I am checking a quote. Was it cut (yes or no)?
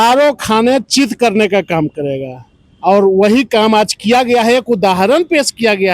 no